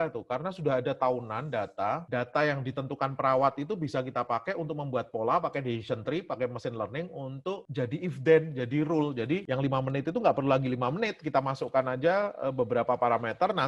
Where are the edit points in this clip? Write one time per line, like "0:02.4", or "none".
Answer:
none